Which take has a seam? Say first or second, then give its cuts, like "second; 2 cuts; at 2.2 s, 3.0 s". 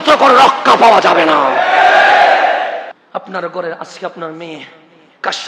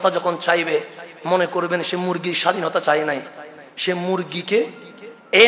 first; 1 cut; at 2.9 s